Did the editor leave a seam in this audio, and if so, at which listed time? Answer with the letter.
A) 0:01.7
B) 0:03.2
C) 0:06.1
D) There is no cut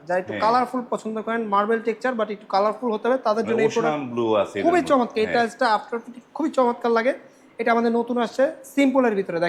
D